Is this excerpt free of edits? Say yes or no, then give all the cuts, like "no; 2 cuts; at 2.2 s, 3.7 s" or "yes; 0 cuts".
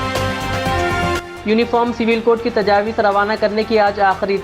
yes; 0 cuts